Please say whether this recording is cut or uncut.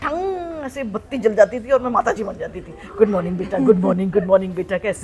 uncut